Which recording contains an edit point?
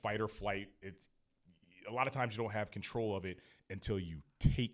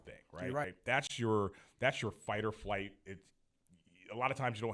second; 1 cut; at 1.0 s

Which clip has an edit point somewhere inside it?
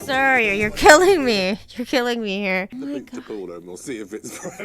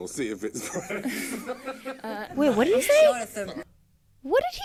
first; 1 cut; at 2.7 s

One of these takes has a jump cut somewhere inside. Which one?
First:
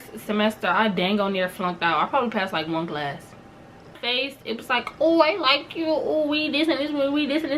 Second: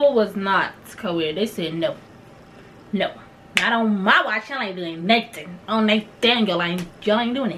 first; 1 cut; at 4.0 s

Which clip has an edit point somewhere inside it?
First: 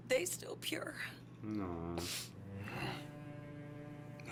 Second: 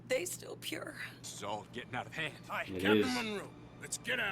second; 1 cut; at 1.2 s

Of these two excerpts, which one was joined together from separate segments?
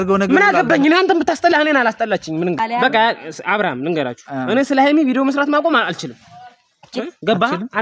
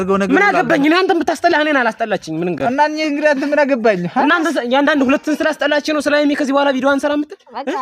first; 1 cut; at 2.6 s

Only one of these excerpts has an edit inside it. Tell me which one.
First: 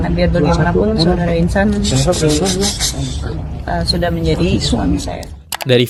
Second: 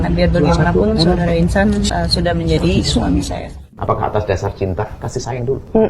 second; 2 cuts; at 1.9 s, 3.7 s

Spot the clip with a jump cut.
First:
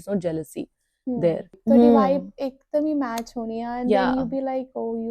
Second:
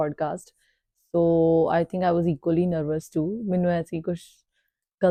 first; 1 cut; at 1.6 s

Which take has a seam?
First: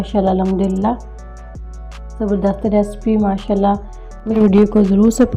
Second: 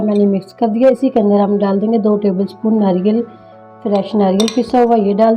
first; 1 cut; at 4.3 s

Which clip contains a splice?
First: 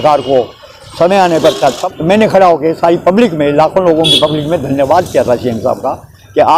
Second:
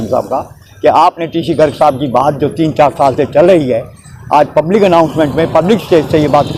first; 1 cut; at 1.8 s

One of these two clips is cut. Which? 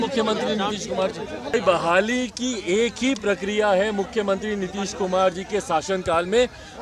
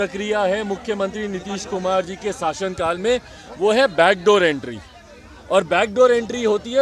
first; 1 cut; at 1.5 s

